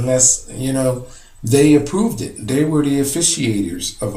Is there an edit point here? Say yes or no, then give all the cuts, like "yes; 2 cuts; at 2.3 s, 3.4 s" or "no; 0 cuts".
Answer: yes; 1 cut; at 2.5 s